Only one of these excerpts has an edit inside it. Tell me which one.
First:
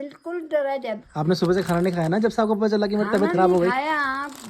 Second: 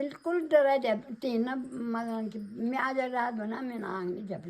first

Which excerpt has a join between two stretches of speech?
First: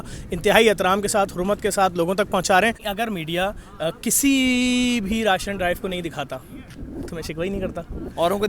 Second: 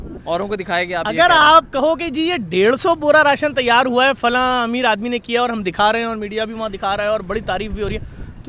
first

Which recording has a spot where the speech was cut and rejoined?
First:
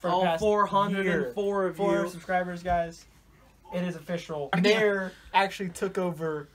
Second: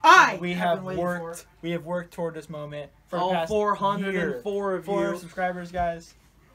first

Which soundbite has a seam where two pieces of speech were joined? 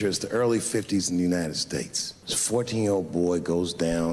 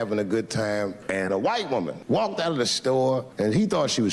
first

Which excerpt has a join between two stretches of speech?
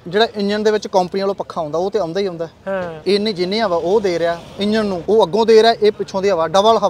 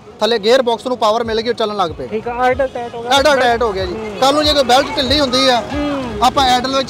first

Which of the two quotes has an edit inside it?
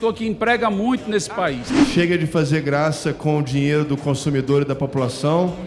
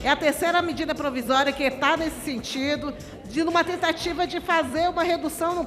first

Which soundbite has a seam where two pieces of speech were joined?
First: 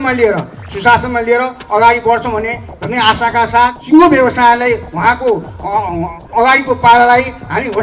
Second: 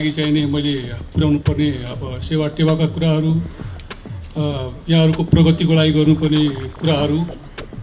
first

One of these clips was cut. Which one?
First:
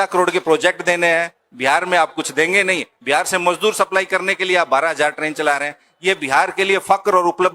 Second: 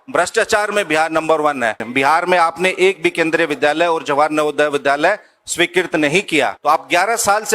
second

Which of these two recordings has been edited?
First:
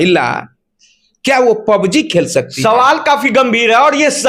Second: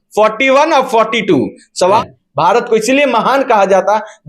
second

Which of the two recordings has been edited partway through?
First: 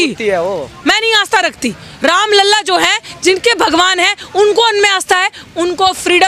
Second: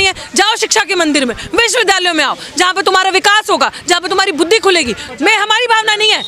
second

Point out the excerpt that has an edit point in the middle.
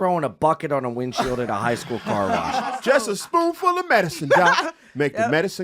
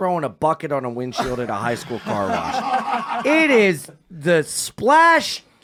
first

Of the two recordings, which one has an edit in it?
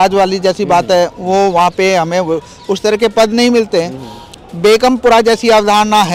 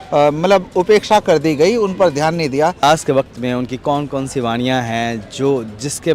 second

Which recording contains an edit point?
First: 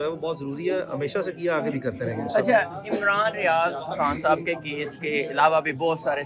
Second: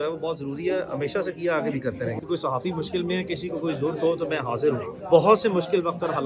second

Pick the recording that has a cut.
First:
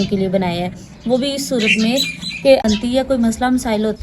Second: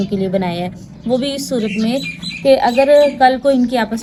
first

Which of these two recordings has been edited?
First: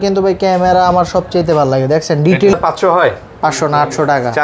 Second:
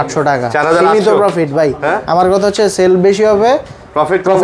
first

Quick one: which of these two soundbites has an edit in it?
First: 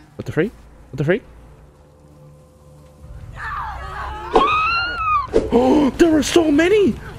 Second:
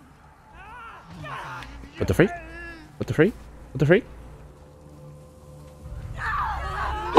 first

